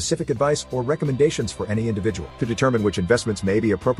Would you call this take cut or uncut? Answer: uncut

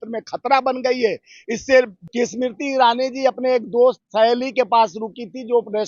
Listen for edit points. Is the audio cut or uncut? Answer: cut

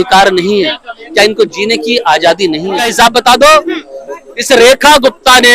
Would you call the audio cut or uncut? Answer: cut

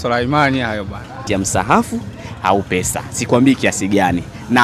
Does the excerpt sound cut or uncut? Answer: cut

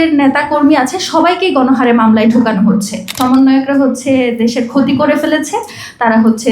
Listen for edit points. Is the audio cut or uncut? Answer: cut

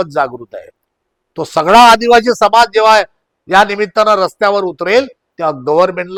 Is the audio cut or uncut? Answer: uncut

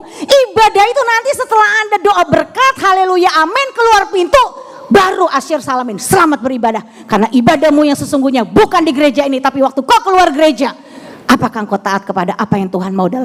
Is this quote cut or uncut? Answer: uncut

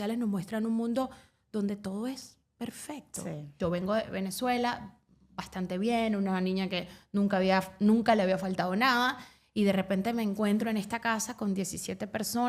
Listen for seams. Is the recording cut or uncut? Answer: cut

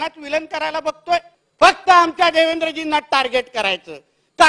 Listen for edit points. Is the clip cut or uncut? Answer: cut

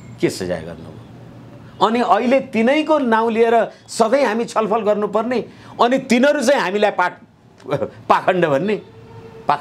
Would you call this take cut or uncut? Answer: uncut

